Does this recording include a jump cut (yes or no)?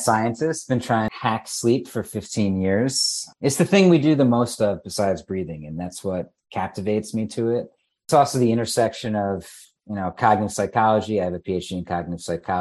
yes